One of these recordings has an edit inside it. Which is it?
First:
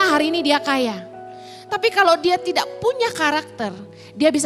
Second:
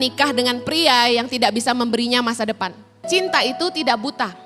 second; 1 cut; at 3.1 s

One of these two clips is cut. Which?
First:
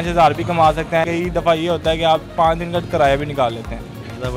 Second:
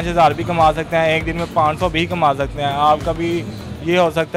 first; 1 cut; at 1.0 s

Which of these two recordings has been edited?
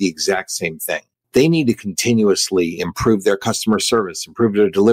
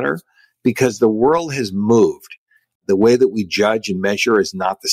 first; 1 cut; at 1.1 s

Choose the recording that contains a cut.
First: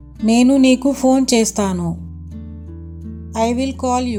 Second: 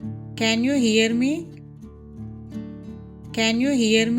second; 2 cuts; at 1.7 s, 3.3 s

